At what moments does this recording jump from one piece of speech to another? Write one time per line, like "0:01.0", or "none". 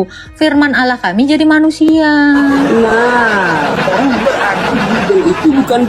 0:04.2